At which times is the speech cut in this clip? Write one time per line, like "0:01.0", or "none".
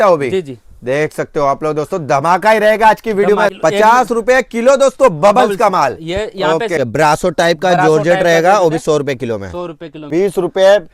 0:03.5
0:06.8
0:10.1

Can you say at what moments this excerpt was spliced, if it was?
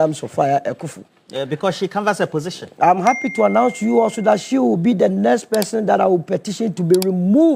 none

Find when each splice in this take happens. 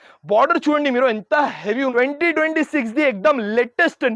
0:01.9

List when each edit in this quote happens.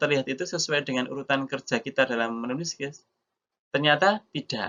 none

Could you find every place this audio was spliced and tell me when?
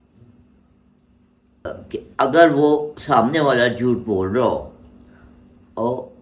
0:01.6

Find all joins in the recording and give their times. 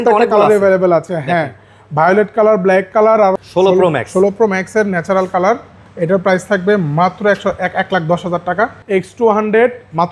0:03.3
0:08.8

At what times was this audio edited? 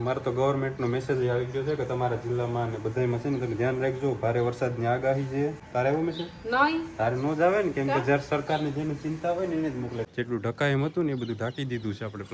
0:05.6
0:10.1

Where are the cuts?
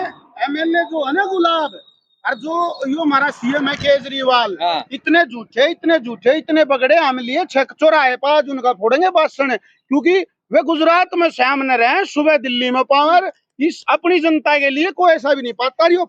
none

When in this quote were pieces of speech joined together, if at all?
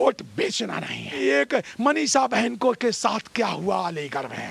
0:01.2

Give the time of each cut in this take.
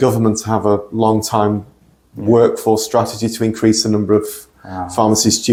none

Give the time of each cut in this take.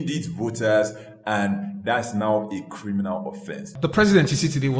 0:03.7

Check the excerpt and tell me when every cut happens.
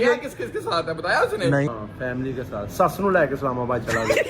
0:01.7

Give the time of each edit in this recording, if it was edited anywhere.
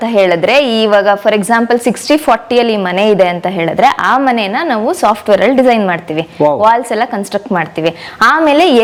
none

